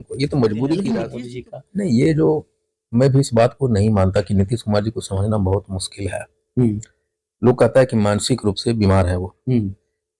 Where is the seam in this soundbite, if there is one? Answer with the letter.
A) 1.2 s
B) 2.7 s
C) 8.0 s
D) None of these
A